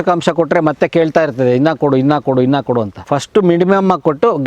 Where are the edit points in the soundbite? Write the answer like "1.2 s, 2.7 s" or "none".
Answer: 3.0 s